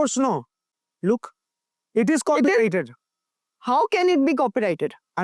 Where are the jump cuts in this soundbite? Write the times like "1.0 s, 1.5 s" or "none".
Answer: none